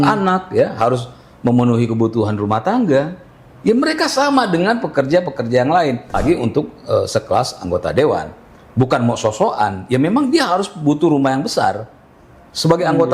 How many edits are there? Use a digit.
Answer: 1